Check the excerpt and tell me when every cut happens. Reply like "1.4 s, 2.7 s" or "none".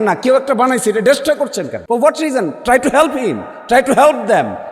1.8 s